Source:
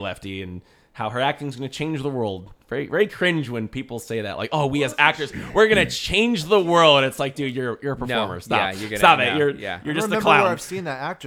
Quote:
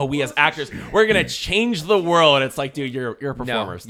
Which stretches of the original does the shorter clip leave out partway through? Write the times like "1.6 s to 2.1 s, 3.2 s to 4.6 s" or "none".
none